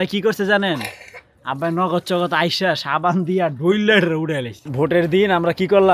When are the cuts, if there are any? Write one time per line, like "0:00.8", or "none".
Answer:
0:04.7